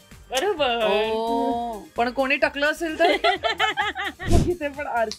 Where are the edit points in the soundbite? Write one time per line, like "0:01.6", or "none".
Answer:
0:04.2